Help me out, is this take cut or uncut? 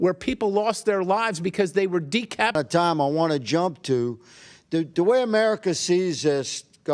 cut